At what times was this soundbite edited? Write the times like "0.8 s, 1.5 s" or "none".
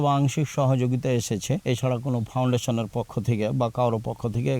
1.6 s